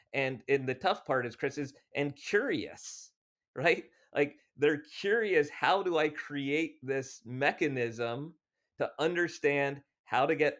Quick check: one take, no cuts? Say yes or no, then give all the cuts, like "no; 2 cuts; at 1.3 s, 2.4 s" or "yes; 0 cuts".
yes; 0 cuts